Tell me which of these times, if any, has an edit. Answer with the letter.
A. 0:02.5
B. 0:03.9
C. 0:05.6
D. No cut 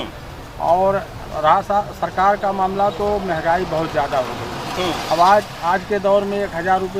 D